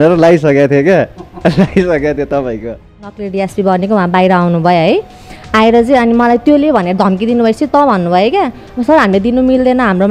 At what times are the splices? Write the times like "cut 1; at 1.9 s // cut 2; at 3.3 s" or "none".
cut 1; at 3.0 s

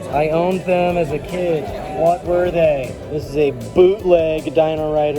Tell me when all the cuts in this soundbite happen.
cut 1; at 1.8 s // cut 2; at 3.0 s

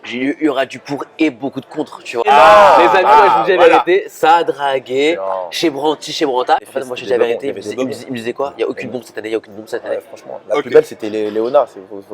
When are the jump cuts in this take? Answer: cut 1; at 2.2 s // cut 2; at 6.6 s

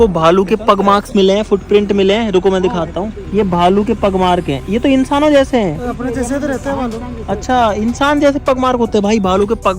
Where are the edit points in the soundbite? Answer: none

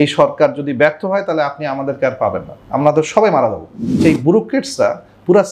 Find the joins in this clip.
cut 1; at 4.0 s

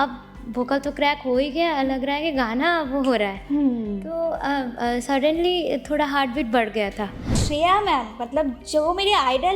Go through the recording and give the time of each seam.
cut 1; at 7.4 s

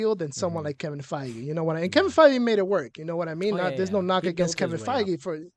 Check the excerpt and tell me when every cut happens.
none

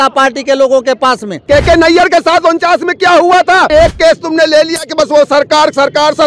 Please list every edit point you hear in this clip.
cut 1; at 1.4 s // cut 2; at 3.7 s

